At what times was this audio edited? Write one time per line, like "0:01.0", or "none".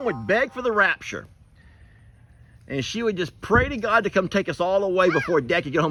none

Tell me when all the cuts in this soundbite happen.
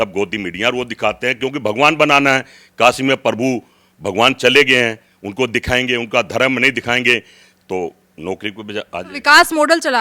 none

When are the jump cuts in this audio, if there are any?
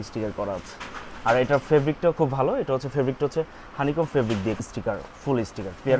0:04.6

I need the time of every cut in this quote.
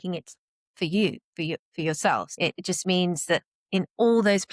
0:02.3

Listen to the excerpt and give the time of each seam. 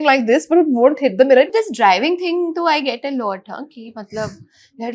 0:01.5

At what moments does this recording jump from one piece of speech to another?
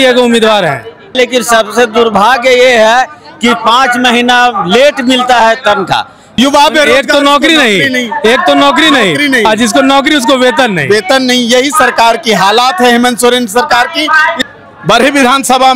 0:01.1
0:06.2
0:14.4

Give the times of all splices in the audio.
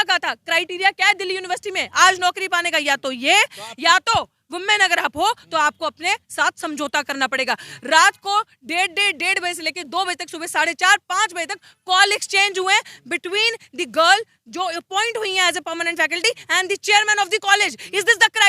none

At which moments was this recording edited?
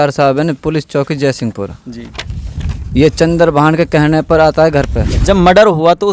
0:05.2

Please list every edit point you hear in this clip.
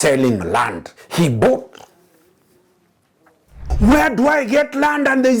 0:03.7

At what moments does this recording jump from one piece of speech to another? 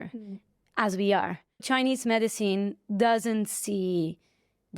0:01.6

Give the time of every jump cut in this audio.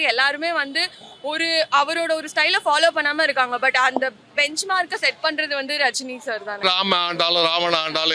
0:06.6

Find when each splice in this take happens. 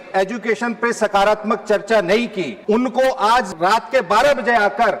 0:02.5
0:03.5

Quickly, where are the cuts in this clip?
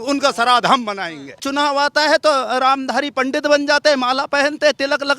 0:01.4

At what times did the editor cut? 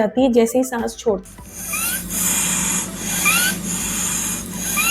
0:01.2

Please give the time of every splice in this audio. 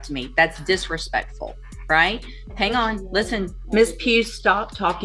0:03.6

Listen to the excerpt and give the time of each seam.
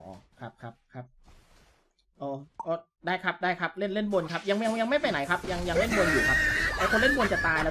none

